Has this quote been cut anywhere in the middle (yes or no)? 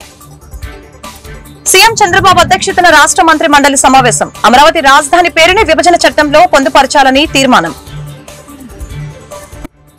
yes